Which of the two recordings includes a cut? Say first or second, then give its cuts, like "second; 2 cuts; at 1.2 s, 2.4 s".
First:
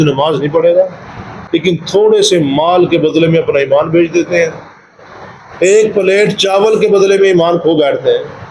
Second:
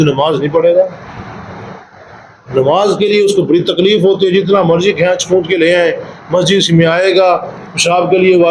first; 1 cut; at 1.3 s